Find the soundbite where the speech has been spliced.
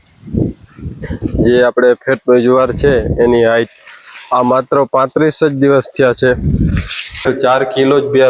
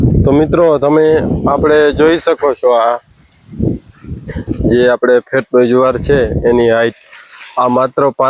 first; 1 cut; at 7.3 s

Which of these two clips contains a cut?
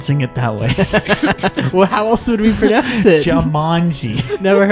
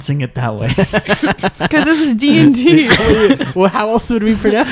first; 1 cut; at 1.6 s

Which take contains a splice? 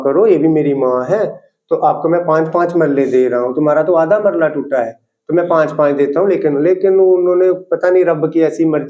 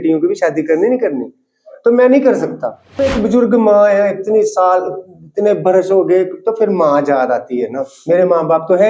second; 1 cut; at 3.1 s

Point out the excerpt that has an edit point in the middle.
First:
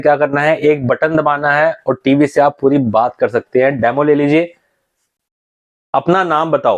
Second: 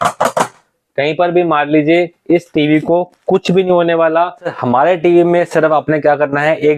second; 1 cut; at 4.5 s

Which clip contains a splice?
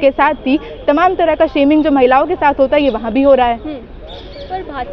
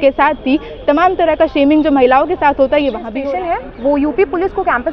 second; 1 cut; at 3.1 s

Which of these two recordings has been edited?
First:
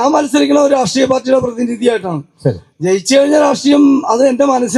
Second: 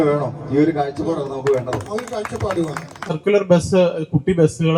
second; 1 cut; at 3.2 s

